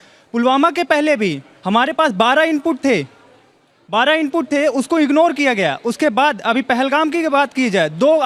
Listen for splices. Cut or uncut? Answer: uncut